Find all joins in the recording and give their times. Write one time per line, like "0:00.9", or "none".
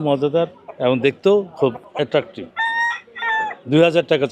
0:02.4